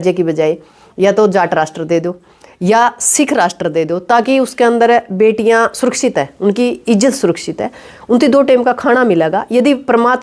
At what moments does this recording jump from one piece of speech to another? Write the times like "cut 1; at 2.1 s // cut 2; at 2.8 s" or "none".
none